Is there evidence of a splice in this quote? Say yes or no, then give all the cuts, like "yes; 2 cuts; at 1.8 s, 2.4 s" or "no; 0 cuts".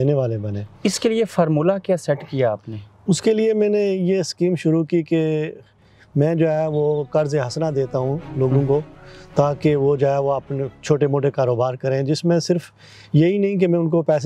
no; 0 cuts